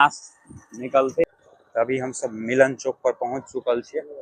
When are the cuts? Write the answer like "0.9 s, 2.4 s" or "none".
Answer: 1.2 s